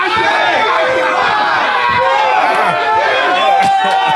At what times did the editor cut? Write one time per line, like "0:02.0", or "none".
none